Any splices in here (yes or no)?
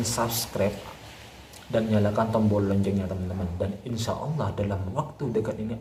no